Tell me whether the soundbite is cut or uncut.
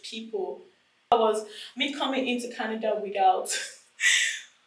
cut